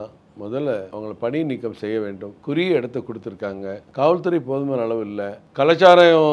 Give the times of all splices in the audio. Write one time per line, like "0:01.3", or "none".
0:00.9
0:02.3
0:03.8
0:05.4